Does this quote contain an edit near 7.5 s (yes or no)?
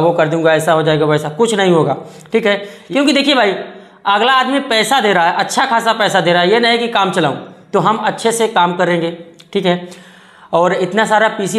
no